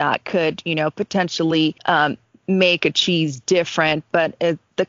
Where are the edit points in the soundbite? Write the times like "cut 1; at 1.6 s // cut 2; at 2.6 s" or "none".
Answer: cut 1; at 1.8 s

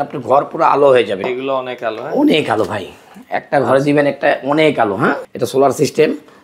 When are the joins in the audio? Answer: cut 1; at 1.2 s // cut 2; at 5.3 s

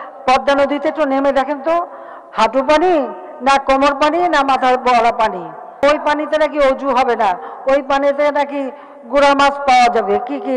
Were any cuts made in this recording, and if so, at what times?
cut 1; at 5.8 s

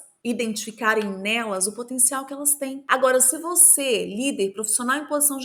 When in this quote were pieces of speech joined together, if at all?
none

